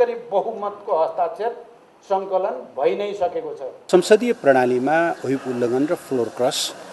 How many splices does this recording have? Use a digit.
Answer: 1